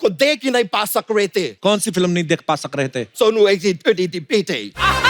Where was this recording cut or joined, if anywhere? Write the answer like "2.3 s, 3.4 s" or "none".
1.5 s, 3.1 s